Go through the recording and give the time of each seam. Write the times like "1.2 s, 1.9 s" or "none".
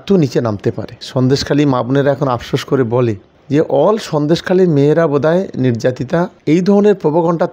1.0 s, 3.3 s, 6.4 s